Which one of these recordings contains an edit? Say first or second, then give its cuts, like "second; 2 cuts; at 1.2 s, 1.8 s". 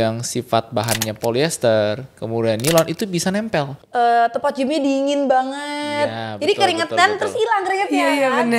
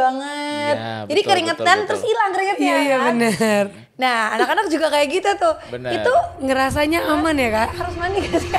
first; 1 cut; at 3.8 s